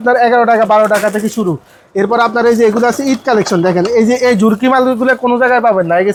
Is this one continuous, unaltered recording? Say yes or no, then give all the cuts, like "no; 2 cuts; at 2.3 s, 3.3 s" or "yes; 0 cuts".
yes; 0 cuts